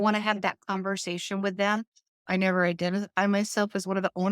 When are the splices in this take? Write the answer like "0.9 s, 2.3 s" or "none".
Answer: 2.2 s